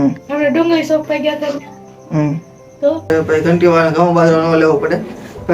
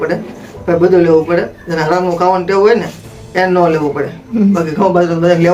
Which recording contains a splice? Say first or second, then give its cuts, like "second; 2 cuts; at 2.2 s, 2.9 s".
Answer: first; 1 cut; at 3.1 s